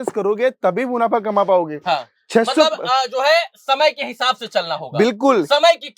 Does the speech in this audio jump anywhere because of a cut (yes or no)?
no